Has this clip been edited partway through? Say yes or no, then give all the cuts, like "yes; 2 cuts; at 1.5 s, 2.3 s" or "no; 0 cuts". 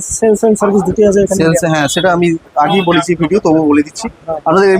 no; 0 cuts